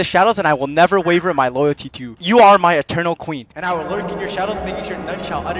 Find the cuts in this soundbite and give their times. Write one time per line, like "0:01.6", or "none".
none